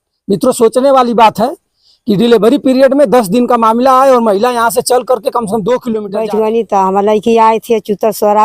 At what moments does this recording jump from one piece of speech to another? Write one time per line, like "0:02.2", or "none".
0:06.1